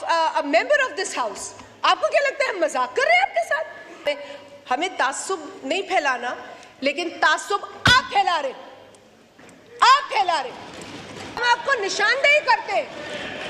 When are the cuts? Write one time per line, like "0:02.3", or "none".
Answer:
0:04.0
0:11.4